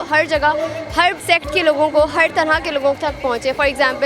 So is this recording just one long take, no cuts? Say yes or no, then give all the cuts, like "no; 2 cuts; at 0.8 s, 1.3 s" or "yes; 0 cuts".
no; 1 cut; at 1.2 s